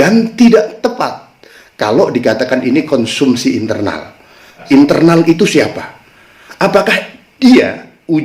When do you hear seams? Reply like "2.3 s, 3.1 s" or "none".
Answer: 4.6 s